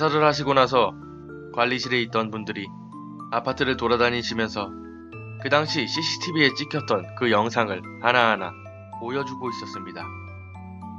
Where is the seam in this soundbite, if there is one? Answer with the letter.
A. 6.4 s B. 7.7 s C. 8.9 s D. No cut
C